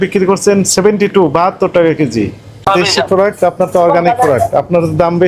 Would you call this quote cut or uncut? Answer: cut